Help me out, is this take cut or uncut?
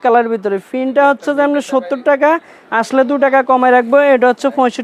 uncut